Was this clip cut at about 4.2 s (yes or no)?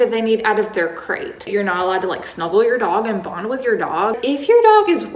yes